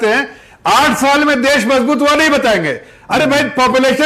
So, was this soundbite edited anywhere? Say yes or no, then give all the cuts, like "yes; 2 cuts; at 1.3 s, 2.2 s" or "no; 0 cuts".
no; 0 cuts